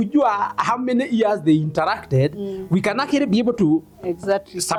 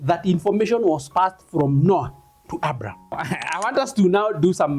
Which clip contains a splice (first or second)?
second